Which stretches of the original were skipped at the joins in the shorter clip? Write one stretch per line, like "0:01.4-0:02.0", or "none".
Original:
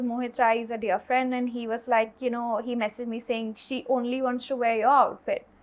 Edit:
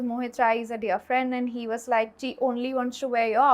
0:02.1-0:03.6